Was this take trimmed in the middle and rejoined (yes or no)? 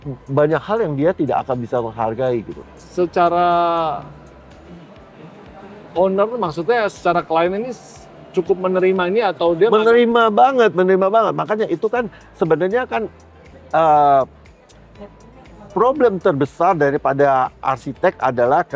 no